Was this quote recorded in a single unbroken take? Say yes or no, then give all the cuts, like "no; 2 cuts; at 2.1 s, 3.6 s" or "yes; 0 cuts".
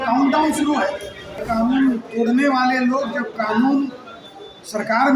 no; 1 cut; at 1.4 s